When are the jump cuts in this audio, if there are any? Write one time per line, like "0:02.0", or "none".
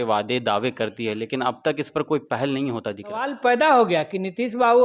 0:03.3